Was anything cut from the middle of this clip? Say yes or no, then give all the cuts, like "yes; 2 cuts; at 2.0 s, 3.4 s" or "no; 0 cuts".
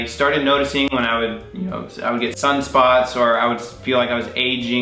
no; 0 cuts